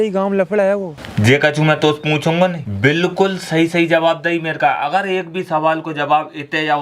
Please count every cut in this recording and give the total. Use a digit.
2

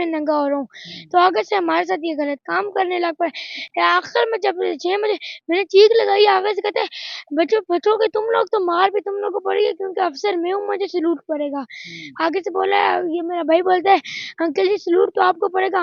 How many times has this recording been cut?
0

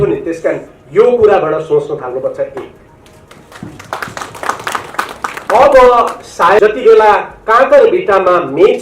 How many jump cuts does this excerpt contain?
1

